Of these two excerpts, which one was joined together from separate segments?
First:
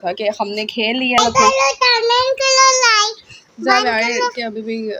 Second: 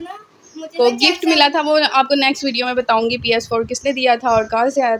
first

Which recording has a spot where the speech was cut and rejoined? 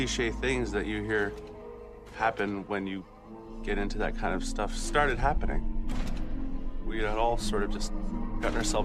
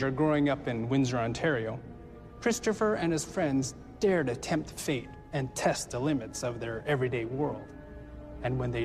first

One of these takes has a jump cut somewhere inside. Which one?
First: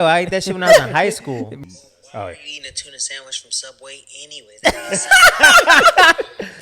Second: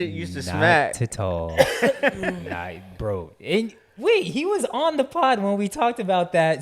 first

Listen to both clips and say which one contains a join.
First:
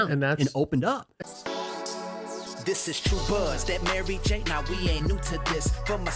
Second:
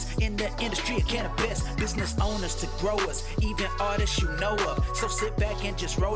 first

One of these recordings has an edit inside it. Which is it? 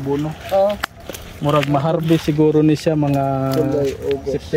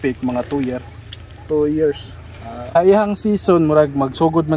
second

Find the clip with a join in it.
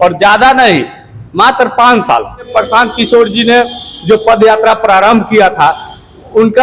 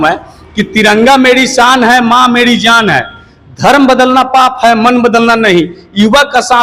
first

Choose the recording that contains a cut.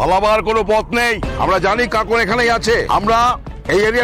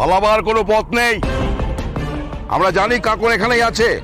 first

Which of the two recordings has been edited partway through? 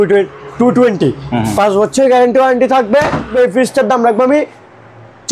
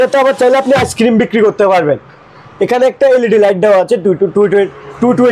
first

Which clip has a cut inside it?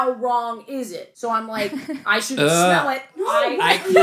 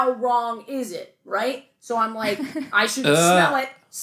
first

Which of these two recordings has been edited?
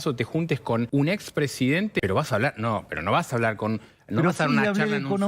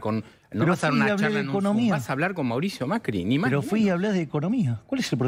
first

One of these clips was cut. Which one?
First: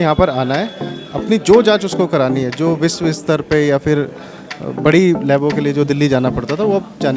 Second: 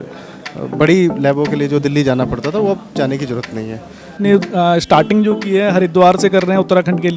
second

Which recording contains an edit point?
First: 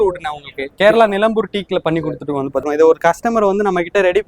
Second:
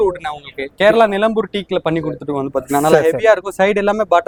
first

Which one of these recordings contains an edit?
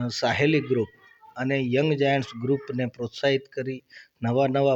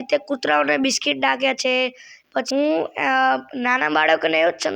second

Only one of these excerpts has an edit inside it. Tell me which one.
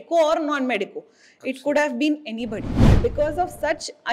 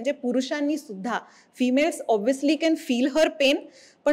first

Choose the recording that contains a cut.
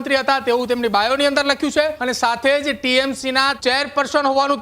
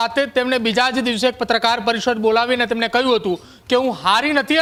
first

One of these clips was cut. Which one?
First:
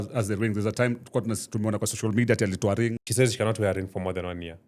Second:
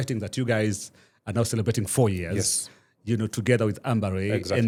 first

